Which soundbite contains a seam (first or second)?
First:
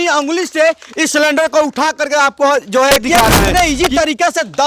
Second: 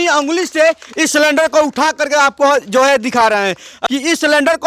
first